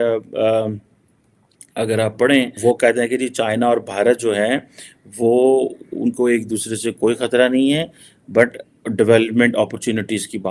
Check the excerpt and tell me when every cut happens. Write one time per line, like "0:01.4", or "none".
0:02.5